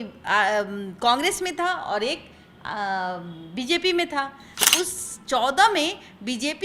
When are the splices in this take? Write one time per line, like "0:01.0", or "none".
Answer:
0:04.5